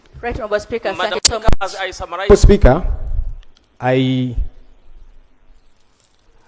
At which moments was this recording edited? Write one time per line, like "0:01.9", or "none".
0:02.3